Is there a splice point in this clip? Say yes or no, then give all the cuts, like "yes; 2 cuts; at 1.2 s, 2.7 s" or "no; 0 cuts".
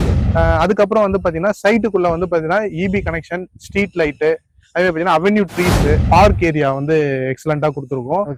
no; 0 cuts